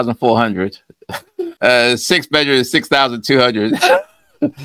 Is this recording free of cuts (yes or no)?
no